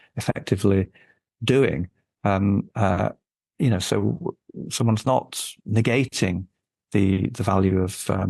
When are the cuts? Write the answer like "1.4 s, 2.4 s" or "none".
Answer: none